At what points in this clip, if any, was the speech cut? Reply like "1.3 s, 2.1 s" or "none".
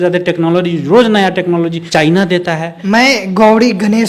1.8 s, 2.7 s